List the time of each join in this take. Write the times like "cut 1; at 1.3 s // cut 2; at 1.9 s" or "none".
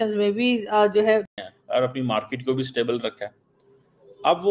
cut 1; at 1.4 s